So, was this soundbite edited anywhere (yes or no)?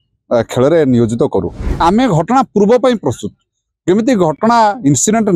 yes